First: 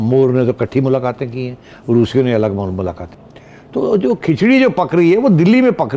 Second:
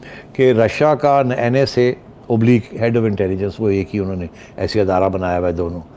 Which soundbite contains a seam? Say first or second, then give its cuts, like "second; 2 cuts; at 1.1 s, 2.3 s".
first; 1 cut; at 3.1 s